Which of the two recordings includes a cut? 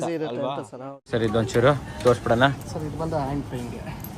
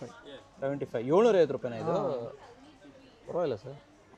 first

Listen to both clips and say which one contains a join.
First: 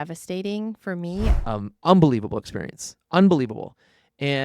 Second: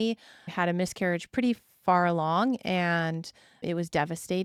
first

